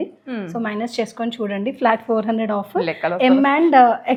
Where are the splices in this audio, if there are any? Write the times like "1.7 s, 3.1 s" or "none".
none